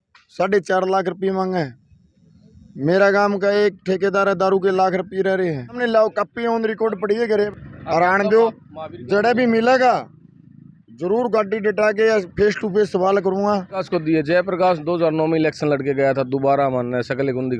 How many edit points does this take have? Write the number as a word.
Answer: three